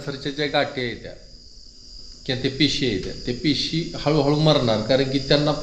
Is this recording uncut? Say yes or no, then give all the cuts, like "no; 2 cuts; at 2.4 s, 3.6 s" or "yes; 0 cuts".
yes; 0 cuts